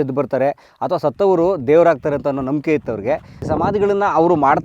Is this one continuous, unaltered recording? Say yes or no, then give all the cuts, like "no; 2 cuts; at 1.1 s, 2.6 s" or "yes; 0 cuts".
yes; 0 cuts